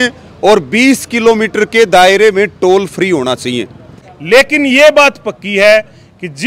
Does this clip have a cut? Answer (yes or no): yes